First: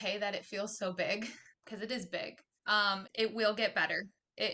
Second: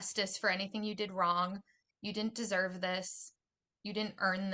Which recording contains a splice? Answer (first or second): first